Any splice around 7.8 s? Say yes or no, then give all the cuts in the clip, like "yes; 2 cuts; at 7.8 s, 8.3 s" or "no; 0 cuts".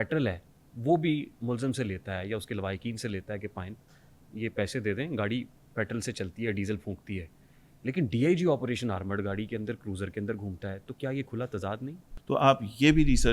no; 1 cut; at 12.1 s